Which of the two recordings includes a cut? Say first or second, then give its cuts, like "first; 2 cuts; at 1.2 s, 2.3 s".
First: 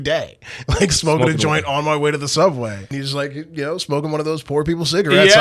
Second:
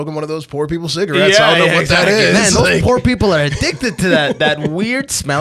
first; 1 cut; at 3.0 s